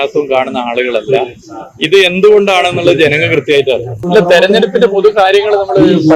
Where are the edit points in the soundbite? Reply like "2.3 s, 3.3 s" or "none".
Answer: 4.0 s